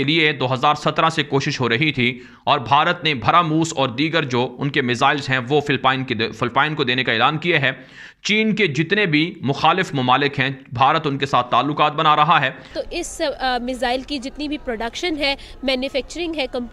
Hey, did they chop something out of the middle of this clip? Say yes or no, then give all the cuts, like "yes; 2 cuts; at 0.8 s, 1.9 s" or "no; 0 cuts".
yes; 1 cut; at 12.8 s